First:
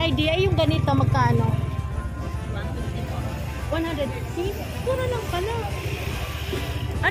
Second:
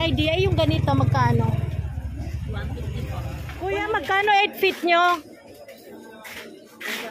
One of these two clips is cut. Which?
second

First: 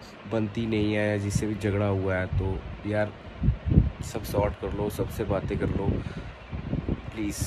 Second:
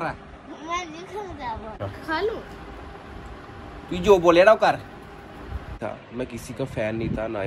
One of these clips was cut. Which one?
second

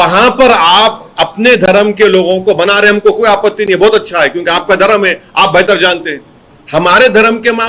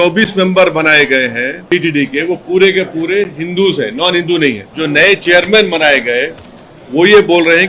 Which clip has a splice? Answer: second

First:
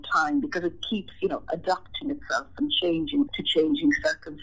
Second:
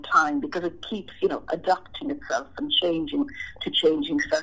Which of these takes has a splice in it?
first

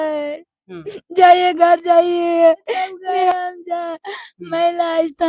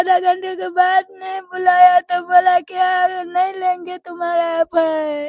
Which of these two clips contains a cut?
first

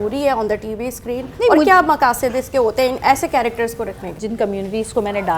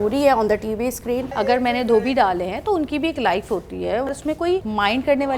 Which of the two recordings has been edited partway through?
second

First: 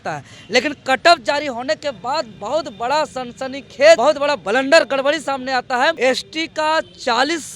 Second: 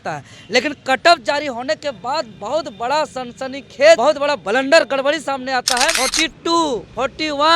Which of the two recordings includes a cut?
second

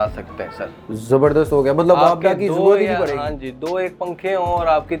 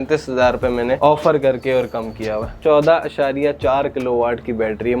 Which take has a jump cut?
second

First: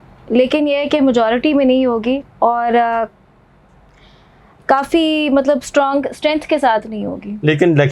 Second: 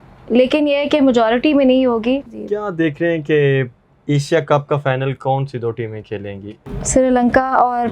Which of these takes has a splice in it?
second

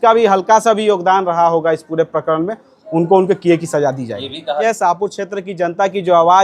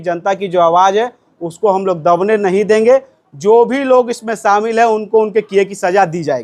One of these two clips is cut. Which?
first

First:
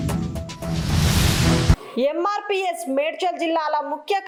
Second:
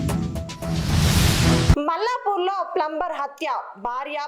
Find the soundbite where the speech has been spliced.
second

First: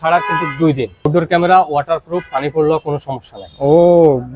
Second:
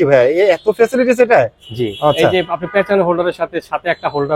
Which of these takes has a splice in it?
first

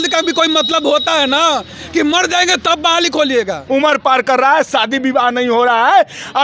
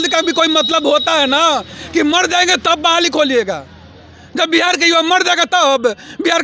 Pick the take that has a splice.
first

